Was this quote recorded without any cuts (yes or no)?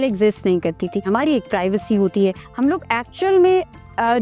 no